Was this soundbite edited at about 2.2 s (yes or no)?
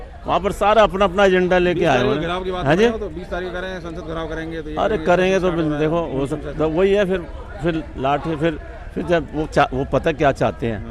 no